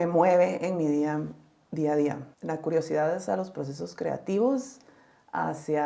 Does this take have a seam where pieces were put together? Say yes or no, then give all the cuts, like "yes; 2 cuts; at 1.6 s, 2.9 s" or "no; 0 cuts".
yes; 1 cut; at 2.3 s